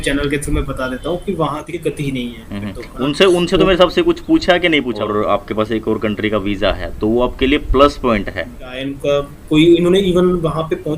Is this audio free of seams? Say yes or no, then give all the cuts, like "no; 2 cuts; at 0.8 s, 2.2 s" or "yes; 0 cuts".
no; 3 cuts; at 1.7 s, 4.9 s, 8.9 s